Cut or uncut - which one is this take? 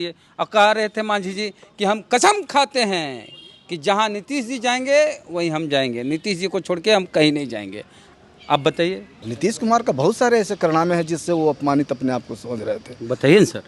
cut